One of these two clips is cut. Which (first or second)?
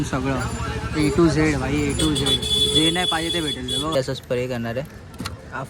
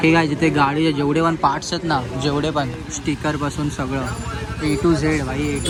first